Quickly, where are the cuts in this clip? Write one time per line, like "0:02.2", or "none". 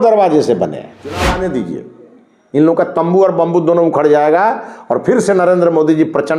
0:01.2